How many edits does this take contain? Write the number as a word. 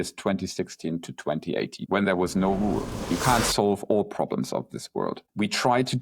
two